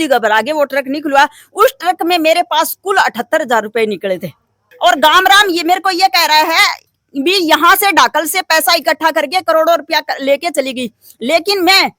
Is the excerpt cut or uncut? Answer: cut